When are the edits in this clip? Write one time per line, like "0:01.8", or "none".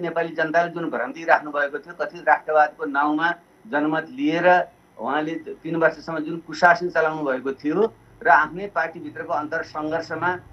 none